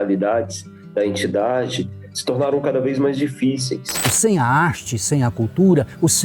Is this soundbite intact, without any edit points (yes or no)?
no